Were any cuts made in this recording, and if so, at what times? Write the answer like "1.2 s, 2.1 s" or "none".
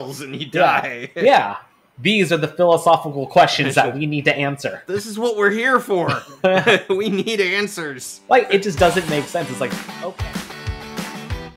9.8 s